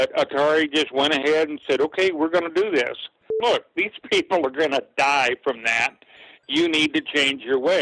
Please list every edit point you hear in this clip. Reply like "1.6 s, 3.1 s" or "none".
3.3 s